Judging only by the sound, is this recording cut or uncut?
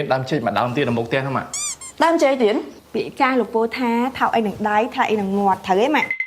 cut